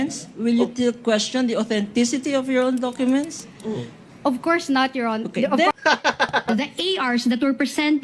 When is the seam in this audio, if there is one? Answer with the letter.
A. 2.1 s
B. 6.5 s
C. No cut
B